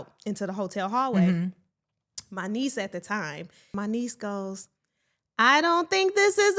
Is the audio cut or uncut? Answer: cut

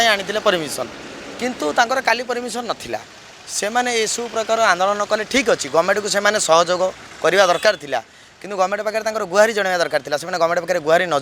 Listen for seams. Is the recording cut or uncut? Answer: uncut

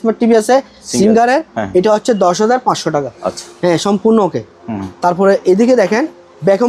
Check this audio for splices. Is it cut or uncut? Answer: uncut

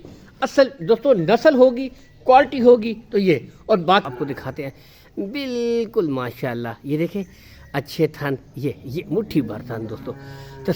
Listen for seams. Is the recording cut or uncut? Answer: cut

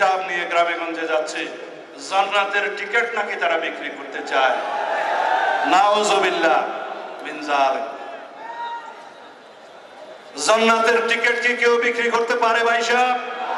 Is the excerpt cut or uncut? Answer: uncut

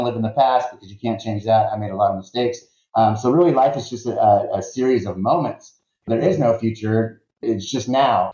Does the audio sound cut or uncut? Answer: cut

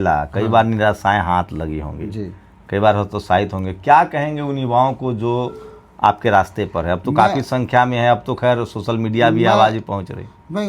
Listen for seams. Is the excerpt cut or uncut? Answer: uncut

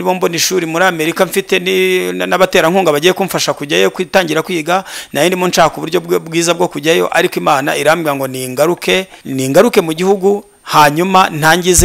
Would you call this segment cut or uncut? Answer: cut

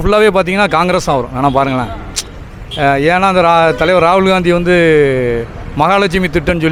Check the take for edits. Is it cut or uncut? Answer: uncut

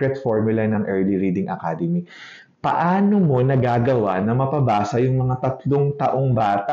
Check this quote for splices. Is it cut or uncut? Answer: uncut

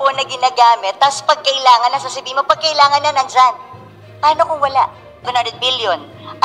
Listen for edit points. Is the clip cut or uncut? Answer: cut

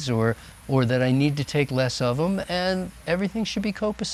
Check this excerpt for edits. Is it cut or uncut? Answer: uncut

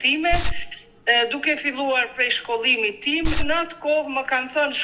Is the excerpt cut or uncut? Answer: cut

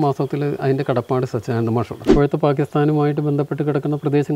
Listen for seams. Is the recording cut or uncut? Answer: cut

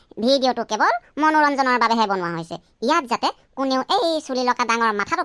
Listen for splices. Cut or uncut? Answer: uncut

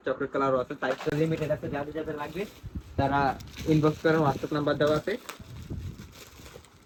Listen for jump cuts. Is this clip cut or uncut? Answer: uncut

